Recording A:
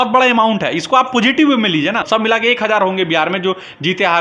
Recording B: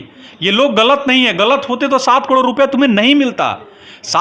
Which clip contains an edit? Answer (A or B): A